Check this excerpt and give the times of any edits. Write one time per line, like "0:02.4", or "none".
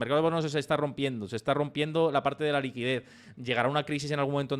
none